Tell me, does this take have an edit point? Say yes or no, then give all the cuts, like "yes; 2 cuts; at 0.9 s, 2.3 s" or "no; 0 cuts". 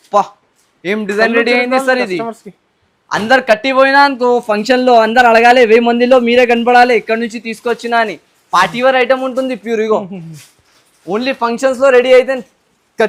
no; 0 cuts